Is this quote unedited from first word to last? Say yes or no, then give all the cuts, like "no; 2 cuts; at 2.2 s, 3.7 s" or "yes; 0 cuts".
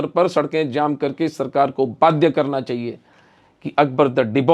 yes; 0 cuts